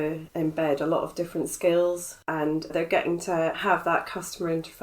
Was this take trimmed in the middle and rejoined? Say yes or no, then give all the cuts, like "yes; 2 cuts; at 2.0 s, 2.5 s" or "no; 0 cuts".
yes; 1 cut; at 2.1 s